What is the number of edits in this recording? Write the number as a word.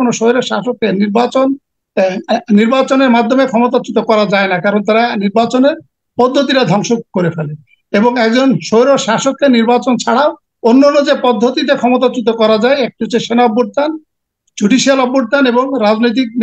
zero